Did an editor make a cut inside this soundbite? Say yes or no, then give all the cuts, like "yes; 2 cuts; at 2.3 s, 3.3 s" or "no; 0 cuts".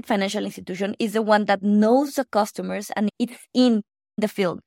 no; 0 cuts